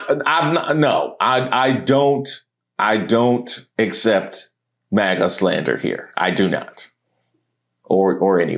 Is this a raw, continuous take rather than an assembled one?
yes; 0 cuts

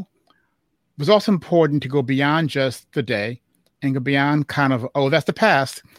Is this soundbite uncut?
yes; 0 cuts

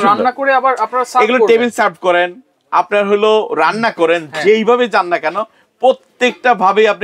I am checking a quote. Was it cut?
no; 0 cuts

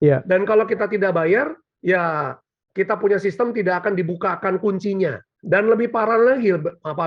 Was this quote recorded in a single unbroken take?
no; 1 cut; at 5.3 s

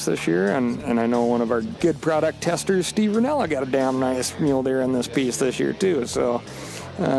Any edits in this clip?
yes; 1 cut; at 1.6 s

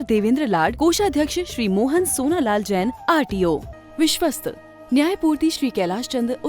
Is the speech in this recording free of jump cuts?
no; 1 cut; at 3.7 s

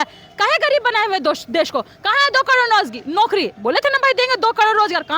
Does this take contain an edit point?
no; 0 cuts

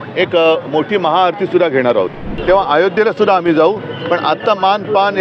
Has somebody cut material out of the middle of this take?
yes; 1 cut; at 2.3 s

